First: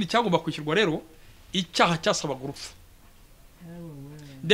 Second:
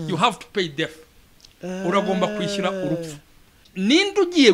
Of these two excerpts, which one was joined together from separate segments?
second; 1 cut; at 3.6 s

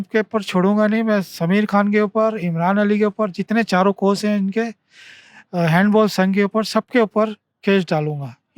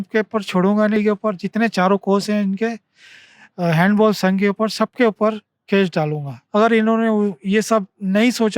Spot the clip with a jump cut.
second; 2 cuts; at 1.0 s, 6.3 s

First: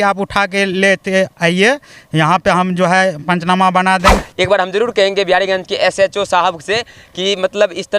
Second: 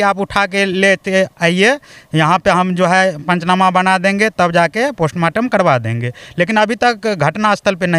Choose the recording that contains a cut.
first; 1 cut; at 4.2 s

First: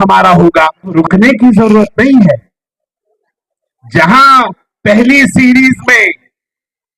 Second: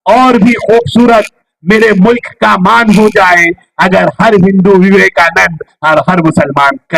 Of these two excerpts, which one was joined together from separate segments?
first; 1 cut; at 0.9 s

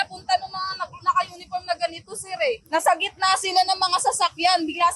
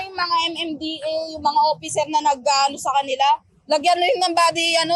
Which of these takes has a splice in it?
first; 1 cut; at 2.6 s

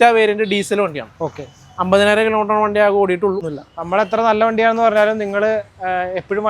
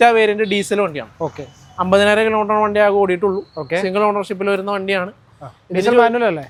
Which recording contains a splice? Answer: first; 1 cut; at 3.5 s

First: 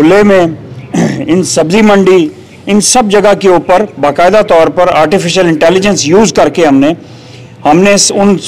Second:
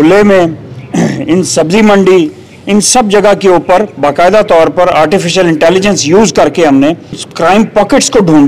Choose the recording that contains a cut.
second; 1 cut; at 7.3 s

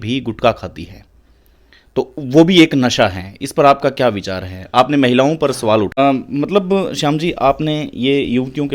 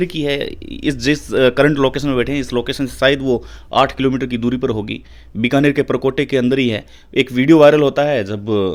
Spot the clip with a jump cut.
first; 1 cut; at 6.0 s

